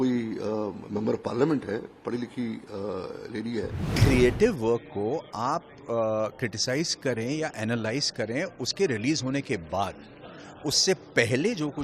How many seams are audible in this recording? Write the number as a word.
one